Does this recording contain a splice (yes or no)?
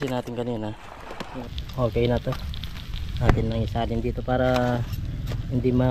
yes